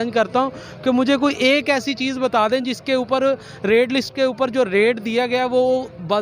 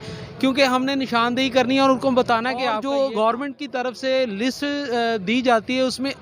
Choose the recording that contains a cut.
second; 1 cut; at 2.8 s

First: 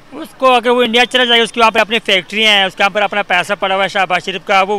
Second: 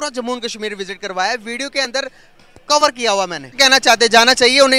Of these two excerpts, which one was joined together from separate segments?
second; 1 cut; at 3.6 s

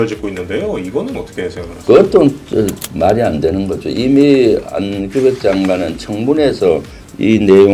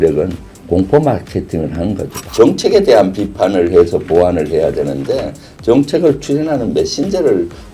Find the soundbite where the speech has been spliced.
second; 1 cut; at 2.2 s

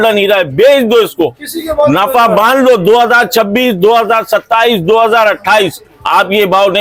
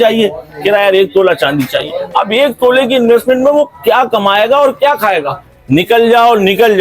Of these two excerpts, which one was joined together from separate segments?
second; 1 cut; at 5.6 s

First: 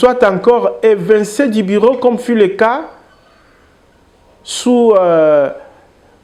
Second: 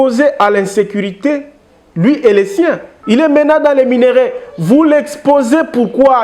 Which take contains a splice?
second; 1 cut; at 2.9 s

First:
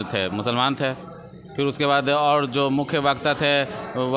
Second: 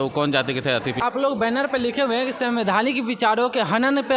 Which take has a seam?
second; 1 cut; at 1.0 s

